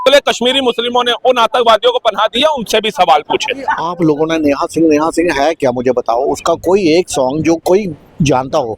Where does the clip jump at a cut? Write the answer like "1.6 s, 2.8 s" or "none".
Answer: 3.8 s